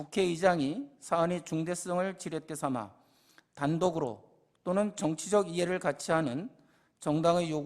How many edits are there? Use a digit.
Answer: 0